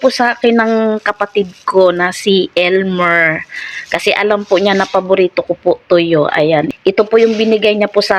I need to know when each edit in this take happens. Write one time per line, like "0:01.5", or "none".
0:06.7